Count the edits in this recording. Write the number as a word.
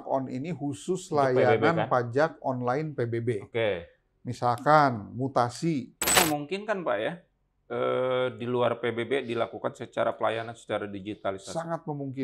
one